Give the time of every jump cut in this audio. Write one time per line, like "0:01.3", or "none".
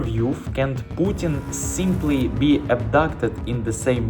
none